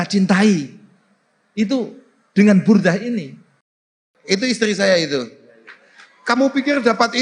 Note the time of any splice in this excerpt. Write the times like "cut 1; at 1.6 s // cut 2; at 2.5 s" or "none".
cut 1; at 3.9 s